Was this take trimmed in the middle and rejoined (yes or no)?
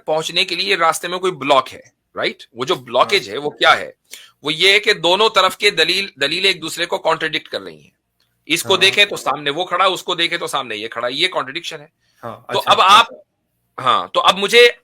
no